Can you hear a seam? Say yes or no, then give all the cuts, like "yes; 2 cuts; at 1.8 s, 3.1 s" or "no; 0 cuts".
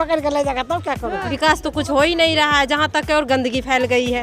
yes; 1 cut; at 1.3 s